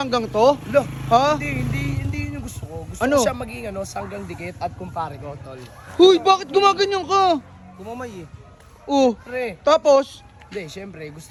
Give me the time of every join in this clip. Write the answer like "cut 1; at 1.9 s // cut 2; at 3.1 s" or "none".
none